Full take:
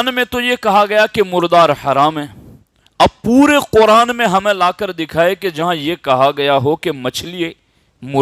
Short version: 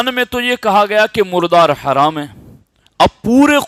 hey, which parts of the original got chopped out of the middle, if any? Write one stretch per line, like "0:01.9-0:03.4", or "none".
none